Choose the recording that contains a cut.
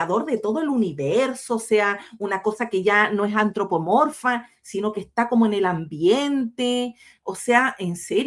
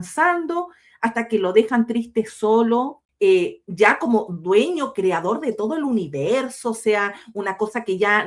second; 1 cut; at 3.0 s

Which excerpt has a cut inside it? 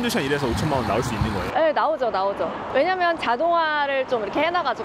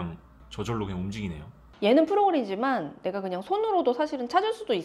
second; 1 cut; at 1.6 s

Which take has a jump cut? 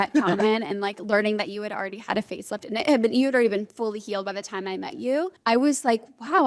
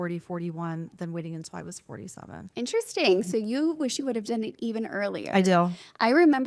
first; 1 cut; at 5.4 s

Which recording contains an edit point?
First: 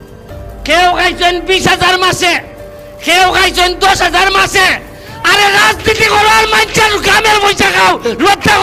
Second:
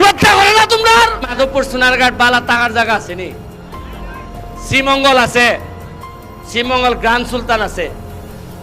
second; 1 cut; at 1.3 s

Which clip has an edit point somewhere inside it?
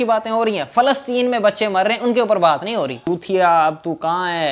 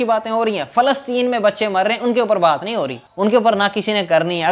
first; 1 cut; at 3.0 s

